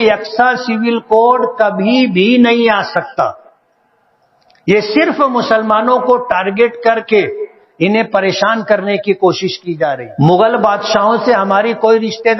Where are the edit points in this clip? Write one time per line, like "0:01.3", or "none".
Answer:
0:10.0